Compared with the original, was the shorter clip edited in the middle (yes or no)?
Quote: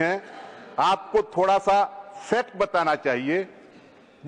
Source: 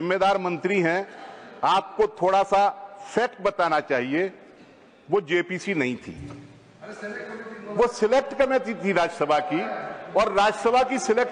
no